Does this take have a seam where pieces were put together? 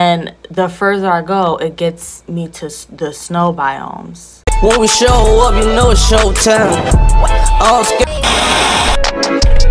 yes; 1 cut; at 4.6 s

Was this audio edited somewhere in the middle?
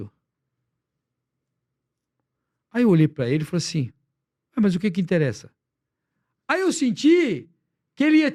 no; 0 cuts

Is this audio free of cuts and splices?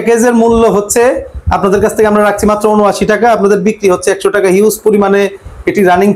yes; 0 cuts

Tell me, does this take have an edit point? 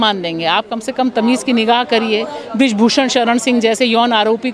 no; 0 cuts

